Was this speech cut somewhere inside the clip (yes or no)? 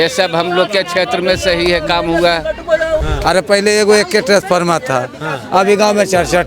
yes